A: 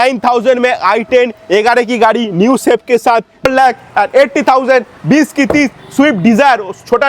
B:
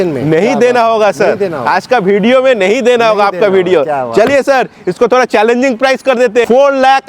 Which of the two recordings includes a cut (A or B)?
A